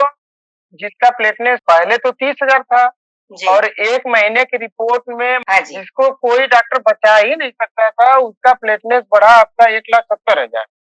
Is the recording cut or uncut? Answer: cut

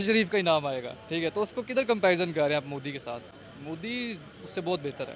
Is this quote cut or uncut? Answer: uncut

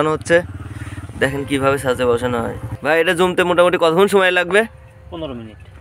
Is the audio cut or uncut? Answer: cut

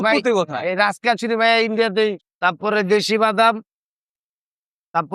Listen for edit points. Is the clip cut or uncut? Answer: cut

